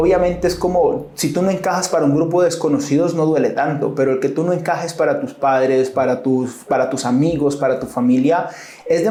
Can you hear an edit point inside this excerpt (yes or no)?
no